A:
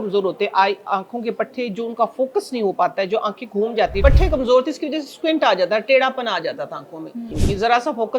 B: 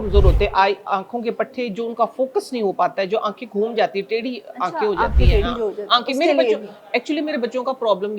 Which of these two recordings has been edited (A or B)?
A